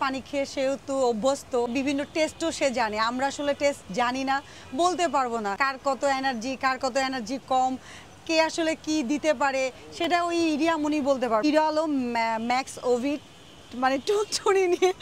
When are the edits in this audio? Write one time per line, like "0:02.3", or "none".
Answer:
0:01.7
0:05.6
0:11.4

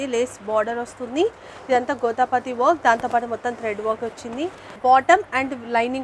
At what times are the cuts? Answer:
0:04.7

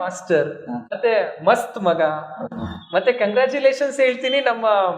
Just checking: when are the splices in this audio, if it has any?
0:01.0

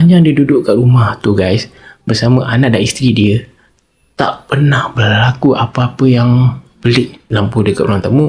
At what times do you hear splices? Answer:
0:07.2

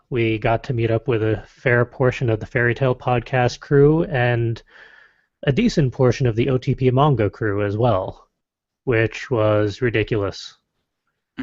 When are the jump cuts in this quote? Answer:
0:03.2

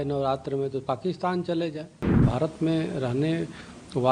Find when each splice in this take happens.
0:02.3

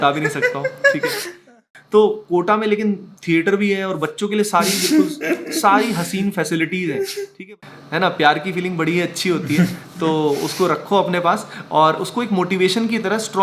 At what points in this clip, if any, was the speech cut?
0:01.3
0:07.4

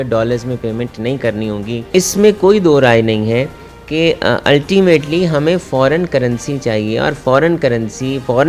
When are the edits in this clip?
0:01.9

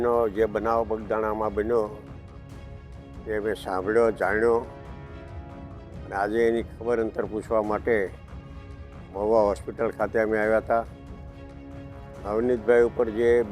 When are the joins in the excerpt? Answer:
0:04.7
0:06.0
0:10.9
0:12.2

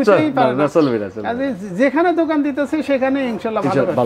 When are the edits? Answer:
none

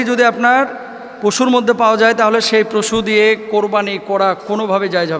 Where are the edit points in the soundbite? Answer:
none

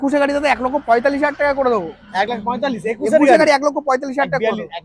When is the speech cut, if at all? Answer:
none

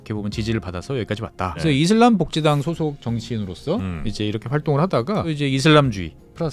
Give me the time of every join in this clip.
0:01.6
0:05.3

